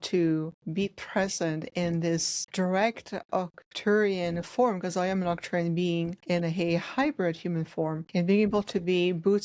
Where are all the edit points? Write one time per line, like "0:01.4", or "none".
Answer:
0:02.4
0:06.2
0:08.0